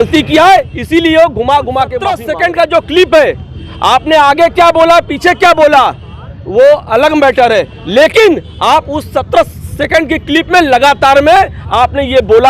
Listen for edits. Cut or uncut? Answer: cut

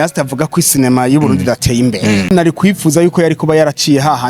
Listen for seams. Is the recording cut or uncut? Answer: cut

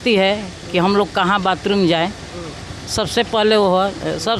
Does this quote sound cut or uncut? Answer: uncut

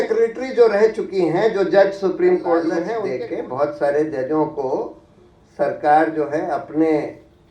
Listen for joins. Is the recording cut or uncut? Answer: cut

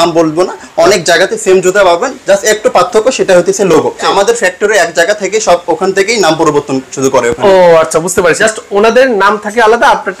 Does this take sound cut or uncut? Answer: cut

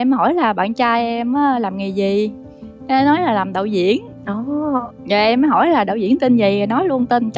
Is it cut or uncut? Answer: uncut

